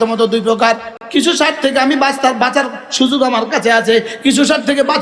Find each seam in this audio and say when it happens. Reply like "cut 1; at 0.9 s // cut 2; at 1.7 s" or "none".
cut 1; at 0.9 s